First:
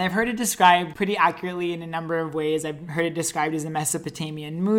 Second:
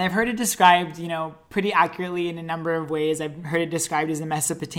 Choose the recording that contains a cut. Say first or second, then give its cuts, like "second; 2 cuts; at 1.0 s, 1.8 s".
first; 1 cut; at 0.9 s